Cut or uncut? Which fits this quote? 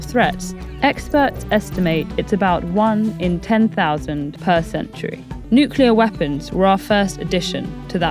cut